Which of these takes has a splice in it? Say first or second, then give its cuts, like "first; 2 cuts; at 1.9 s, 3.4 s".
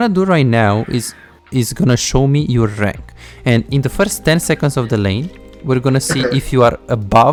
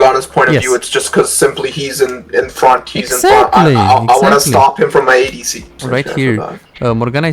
second; 1 cut; at 5.8 s